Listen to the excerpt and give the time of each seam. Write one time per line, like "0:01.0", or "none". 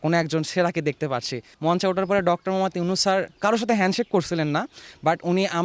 0:01.4